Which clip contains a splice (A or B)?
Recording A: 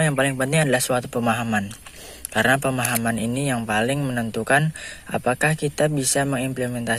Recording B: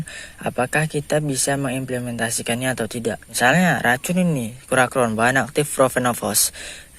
B